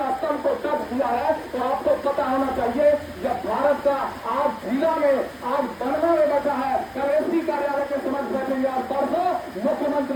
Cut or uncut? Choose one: uncut